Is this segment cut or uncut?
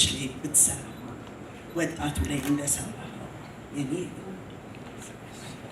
uncut